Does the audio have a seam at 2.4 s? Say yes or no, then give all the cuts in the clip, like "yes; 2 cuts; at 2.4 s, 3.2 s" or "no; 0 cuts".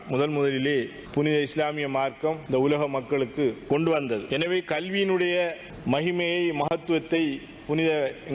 yes; 5 cuts; at 1.0 s, 2.4 s, 3.6 s, 4.2 s, 5.7 s